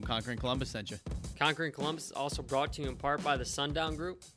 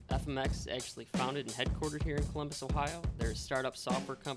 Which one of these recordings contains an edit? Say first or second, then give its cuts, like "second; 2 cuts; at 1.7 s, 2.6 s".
first; 1 cut; at 1.2 s